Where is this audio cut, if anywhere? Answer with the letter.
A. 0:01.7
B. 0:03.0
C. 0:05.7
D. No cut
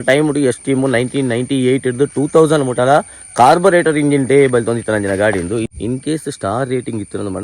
C